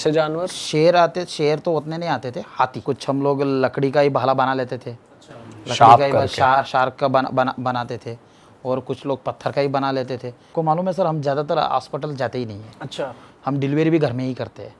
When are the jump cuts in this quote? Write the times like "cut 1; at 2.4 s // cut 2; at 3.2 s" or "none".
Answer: cut 1; at 2.8 s // cut 2; at 10.4 s